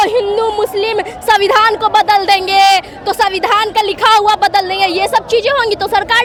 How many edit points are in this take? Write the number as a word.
zero